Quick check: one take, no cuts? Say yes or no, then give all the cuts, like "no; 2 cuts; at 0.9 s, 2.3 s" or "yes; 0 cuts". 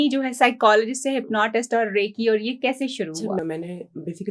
no; 1 cut; at 3.4 s